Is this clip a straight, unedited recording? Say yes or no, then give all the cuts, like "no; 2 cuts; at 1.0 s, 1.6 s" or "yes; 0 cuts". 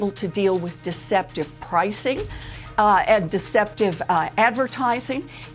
yes; 0 cuts